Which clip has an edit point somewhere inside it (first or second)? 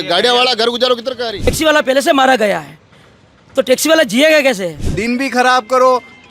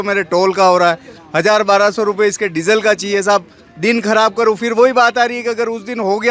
first